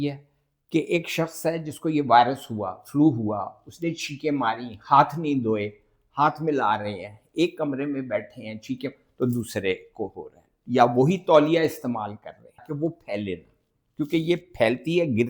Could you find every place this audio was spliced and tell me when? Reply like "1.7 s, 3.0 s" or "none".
12.6 s